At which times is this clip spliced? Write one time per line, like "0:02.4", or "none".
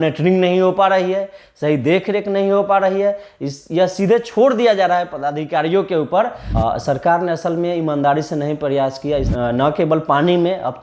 0:06.4
0:09.3